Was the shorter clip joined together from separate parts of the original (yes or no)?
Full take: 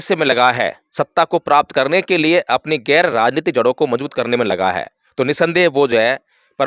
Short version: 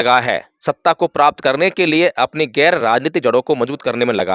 no